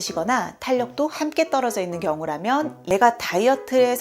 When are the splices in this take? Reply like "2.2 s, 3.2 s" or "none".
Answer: 2.8 s